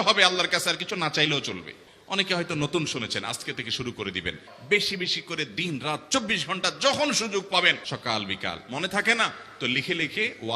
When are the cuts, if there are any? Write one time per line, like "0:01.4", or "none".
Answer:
0:01.8
0:04.5
0:07.8